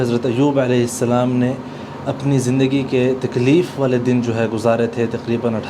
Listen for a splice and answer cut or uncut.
uncut